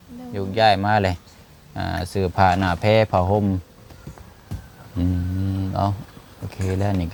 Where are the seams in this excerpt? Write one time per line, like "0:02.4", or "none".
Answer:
none